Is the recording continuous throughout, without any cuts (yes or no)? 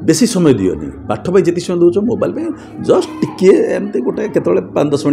yes